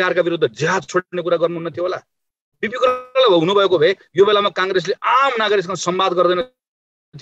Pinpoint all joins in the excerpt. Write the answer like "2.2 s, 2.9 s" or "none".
none

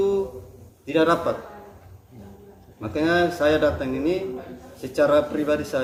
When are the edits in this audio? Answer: none

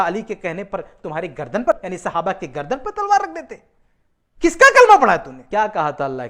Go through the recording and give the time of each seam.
1.7 s, 5.4 s

